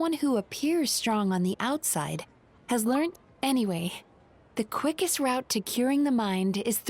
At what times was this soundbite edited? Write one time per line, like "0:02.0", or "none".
0:03.2